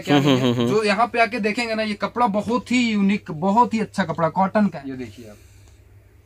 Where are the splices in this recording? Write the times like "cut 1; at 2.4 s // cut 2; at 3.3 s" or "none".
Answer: cut 1; at 4.8 s